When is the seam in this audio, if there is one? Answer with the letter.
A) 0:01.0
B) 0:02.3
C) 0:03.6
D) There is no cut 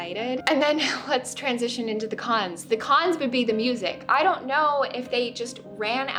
D